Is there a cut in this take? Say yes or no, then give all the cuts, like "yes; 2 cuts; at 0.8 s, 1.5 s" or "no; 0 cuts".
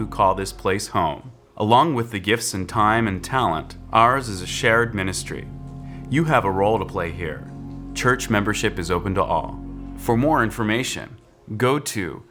no; 0 cuts